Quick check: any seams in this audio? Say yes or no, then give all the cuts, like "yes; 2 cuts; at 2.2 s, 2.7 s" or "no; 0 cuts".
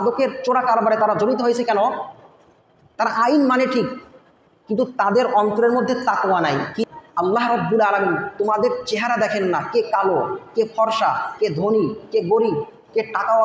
yes; 1 cut; at 6.8 s